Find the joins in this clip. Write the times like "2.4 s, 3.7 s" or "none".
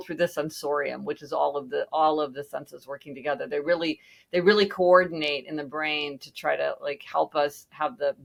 none